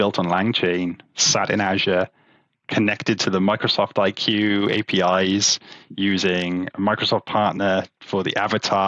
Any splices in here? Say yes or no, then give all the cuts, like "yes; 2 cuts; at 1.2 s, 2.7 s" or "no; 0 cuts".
no; 0 cuts